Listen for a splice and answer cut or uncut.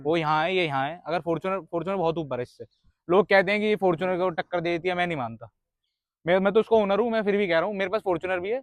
uncut